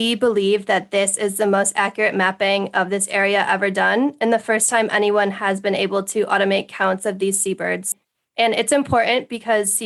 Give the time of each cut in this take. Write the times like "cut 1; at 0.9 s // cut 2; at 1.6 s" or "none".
cut 1; at 7.9 s